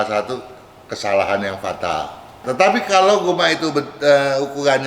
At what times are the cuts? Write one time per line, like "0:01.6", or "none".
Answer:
0:02.5